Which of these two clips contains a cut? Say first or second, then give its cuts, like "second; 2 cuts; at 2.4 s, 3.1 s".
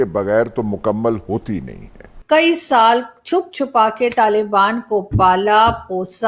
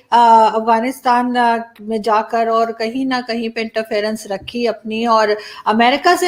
first; 1 cut; at 2.1 s